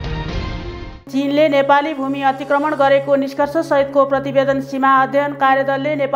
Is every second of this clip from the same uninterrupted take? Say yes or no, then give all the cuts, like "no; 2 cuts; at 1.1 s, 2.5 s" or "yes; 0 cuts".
no; 1 cut; at 0.9 s